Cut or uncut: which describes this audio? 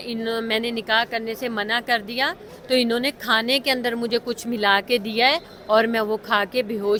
uncut